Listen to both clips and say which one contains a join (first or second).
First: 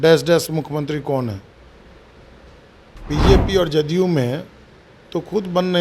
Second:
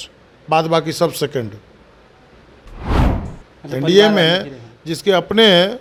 first